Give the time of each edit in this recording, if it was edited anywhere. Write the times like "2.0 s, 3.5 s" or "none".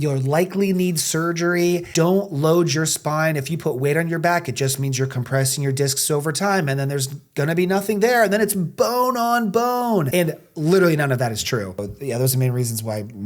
1.9 s, 10.1 s, 11.9 s